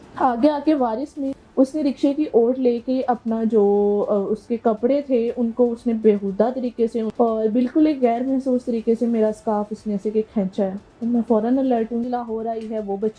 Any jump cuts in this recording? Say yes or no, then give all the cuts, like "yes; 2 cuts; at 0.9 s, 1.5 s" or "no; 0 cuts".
yes; 3 cuts; at 1.4 s, 7.1 s, 12.1 s